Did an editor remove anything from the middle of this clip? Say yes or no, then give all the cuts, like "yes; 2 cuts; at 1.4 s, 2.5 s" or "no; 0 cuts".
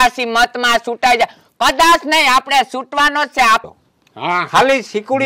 yes; 1 cut; at 3.6 s